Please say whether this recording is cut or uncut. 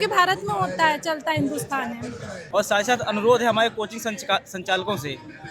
cut